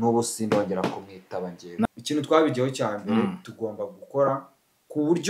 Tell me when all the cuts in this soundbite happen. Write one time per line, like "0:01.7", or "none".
0:01.8